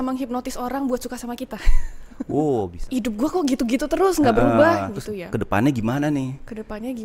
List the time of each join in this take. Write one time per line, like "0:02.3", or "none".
0:02.8